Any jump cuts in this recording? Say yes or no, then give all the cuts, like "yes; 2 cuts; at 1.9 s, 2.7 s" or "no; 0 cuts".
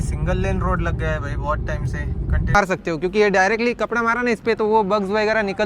yes; 1 cut; at 2.5 s